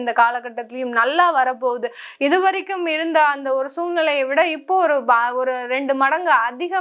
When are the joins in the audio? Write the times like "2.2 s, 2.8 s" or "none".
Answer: none